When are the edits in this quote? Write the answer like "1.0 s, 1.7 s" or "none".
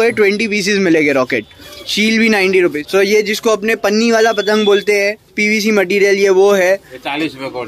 1.6 s, 2.8 s